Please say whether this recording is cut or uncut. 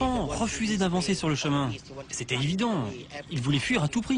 uncut